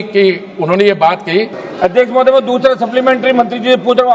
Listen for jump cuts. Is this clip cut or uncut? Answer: cut